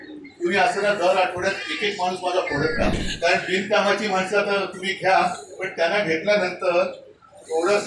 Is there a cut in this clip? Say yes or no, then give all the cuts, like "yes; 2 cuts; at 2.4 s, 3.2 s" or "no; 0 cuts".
yes; 1 cut; at 2.9 s